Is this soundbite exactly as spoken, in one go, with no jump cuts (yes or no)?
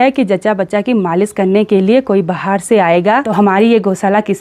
no